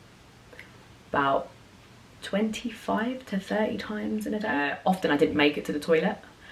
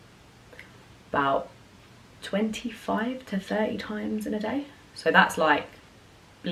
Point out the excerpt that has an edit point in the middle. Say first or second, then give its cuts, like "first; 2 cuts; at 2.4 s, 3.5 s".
first; 1 cut; at 4.8 s